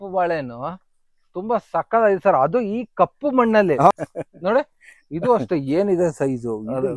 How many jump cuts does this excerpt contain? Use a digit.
1